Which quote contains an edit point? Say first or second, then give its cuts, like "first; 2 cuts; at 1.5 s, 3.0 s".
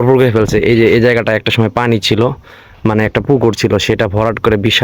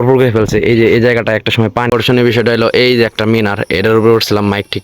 second; 1 cut; at 1.9 s